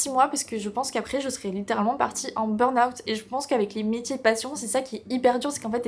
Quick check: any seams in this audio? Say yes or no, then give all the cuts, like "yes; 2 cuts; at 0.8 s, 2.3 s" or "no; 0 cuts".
no; 0 cuts